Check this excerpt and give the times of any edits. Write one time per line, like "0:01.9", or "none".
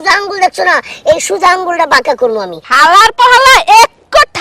0:02.6

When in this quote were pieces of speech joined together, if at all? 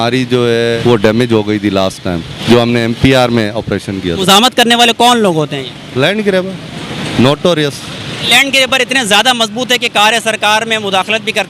0:00.8
0:02.3
0:04.2
0:08.3

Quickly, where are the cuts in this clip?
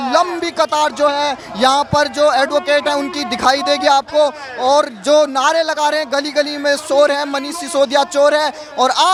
none

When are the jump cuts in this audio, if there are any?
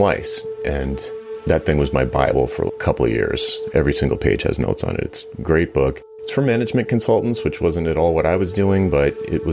0:01.1

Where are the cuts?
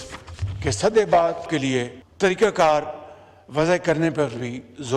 none

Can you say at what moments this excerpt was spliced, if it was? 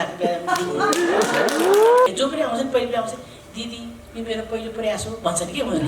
0:02.1

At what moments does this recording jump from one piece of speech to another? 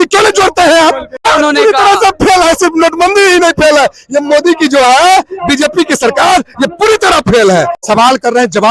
0:01.3
0:07.8

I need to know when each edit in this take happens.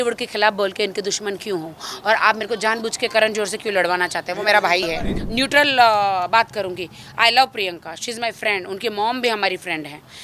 0:04.9

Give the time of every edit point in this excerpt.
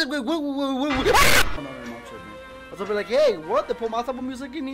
0:01.5

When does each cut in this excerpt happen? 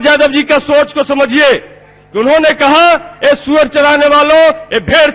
none

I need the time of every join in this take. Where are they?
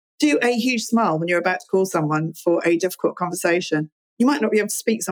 0:04.0

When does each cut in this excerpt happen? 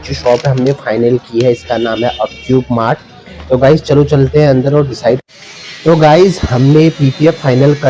none

